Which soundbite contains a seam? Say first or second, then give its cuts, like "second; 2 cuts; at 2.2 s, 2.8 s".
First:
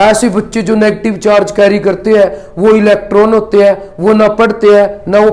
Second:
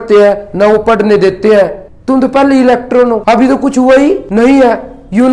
second; 3 cuts; at 1.8 s, 3.2 s, 4.2 s